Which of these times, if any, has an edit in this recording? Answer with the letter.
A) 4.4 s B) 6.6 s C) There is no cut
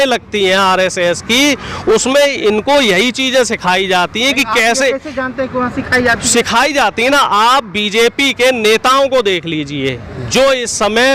C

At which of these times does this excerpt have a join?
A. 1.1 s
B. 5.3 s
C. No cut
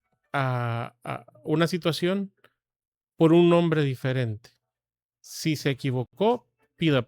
C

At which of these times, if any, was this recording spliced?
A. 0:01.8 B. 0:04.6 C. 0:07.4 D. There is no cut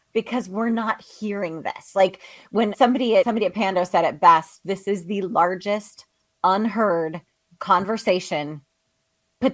D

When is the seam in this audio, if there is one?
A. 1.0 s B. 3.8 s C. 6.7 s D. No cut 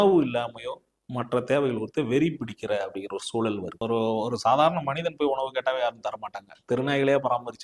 B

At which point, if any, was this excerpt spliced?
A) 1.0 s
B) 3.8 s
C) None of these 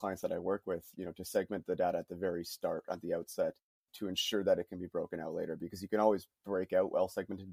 B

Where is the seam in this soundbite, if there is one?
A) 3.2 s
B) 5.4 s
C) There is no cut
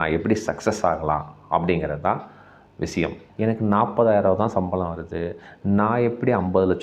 A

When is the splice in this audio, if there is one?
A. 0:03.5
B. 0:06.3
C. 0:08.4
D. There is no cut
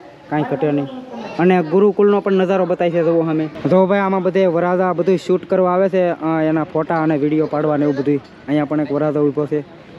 A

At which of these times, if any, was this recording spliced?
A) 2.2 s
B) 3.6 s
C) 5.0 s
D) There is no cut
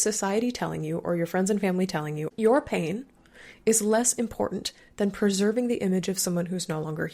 A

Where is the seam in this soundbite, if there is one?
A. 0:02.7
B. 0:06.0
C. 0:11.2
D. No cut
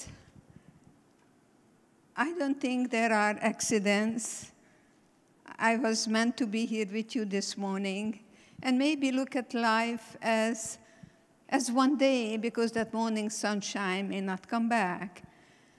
A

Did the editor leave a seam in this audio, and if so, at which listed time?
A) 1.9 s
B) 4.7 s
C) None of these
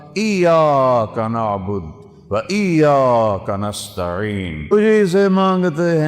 B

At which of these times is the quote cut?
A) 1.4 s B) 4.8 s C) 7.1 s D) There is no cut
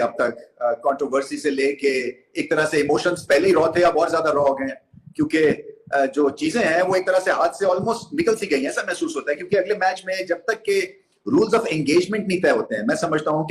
D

